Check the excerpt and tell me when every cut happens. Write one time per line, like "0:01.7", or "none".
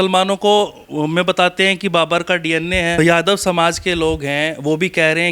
0:03.0